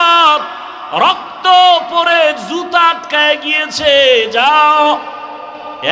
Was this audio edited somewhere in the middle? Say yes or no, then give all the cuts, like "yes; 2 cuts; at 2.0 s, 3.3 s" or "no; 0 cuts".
no; 0 cuts